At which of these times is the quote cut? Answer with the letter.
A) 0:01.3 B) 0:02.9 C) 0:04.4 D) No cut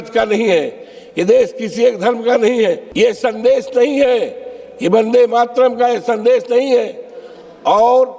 B